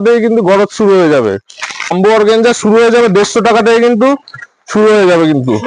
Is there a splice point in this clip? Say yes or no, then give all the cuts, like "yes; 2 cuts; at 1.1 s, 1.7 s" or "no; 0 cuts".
yes; 1 cut; at 1.9 s